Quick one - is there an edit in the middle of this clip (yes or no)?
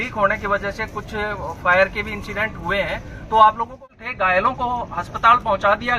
yes